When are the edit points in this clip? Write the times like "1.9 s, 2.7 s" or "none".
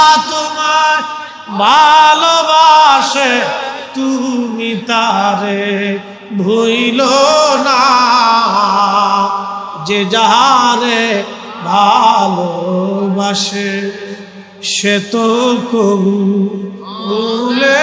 none

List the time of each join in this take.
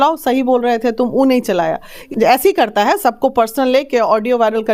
1.9 s

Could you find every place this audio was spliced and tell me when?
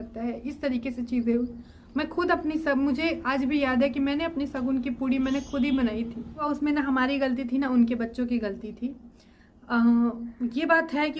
6.4 s

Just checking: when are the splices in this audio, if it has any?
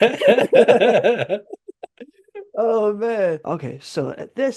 3.4 s

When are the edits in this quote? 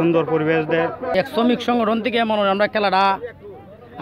1.1 s

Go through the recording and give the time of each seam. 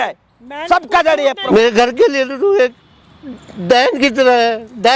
1.4 s

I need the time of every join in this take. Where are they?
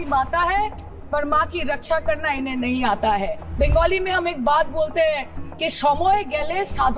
3.4 s

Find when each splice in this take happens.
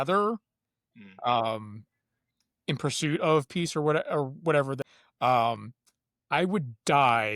4.8 s

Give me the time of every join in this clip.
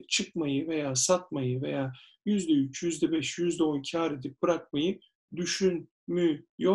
none

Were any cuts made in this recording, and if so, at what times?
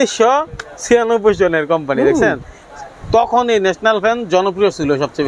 none

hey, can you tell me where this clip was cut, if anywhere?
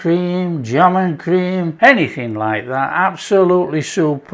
1.7 s

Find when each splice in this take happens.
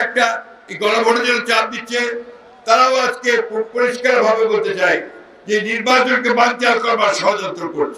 none

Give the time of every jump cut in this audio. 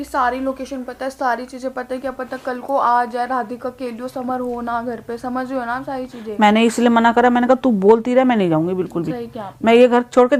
none

